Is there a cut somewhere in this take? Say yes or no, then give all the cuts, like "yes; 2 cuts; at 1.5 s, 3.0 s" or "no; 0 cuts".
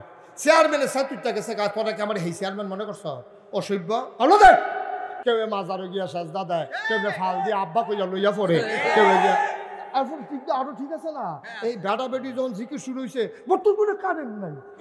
yes; 1 cut; at 5.2 s